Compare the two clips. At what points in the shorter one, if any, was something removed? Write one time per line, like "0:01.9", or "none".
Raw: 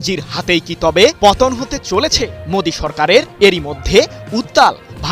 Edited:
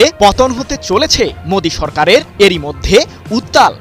none